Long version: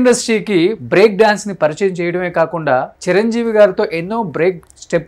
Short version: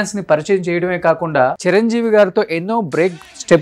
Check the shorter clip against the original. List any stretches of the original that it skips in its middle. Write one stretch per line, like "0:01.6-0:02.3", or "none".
0:02.9-0:03.0